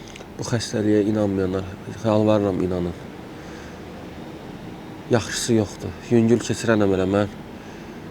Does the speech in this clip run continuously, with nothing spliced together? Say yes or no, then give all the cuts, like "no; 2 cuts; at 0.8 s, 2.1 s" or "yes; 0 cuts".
yes; 0 cuts